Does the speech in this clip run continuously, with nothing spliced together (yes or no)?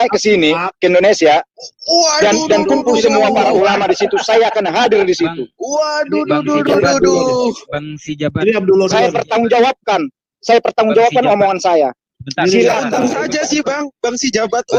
yes